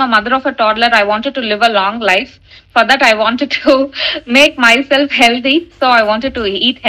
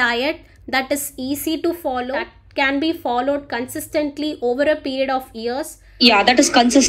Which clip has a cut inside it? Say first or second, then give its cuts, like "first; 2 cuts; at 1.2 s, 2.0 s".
second; 2 cuts; at 2.3 s, 5.8 s